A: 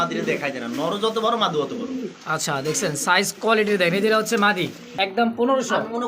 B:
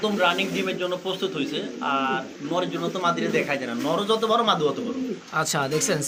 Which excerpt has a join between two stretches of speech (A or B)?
A